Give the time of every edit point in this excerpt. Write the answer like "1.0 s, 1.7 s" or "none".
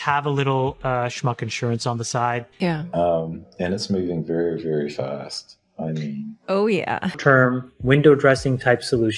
2.5 s, 7.2 s

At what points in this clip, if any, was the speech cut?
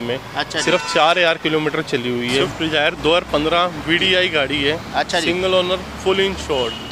2.5 s

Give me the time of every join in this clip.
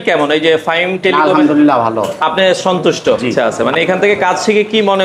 3.6 s

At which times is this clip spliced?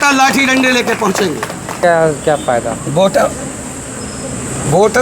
1.8 s

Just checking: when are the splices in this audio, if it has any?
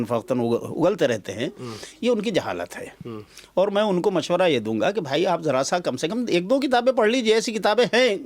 none

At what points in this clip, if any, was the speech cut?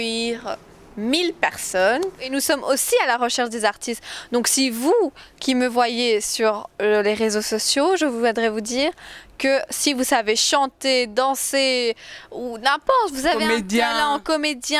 2.3 s

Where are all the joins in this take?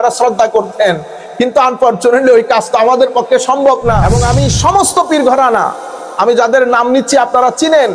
4.1 s

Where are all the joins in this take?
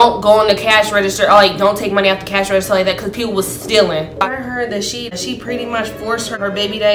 4.4 s

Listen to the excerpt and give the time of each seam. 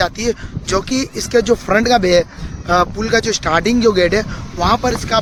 none

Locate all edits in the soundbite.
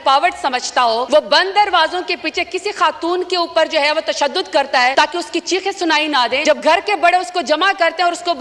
1.1 s, 4.9 s, 6.4 s

